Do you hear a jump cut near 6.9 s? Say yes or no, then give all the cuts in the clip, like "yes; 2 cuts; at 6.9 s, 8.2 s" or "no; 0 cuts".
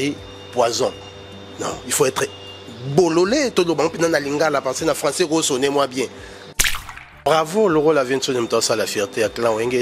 yes; 1 cut; at 6.9 s